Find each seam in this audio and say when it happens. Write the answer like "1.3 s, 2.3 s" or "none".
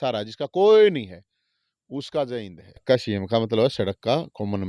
2.8 s